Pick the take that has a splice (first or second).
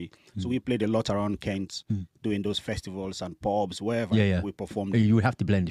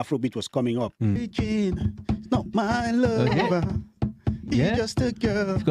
second